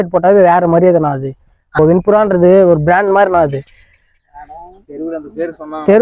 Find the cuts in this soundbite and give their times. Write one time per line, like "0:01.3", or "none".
none